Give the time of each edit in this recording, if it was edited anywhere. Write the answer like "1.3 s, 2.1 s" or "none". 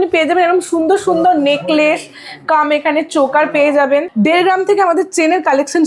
4.1 s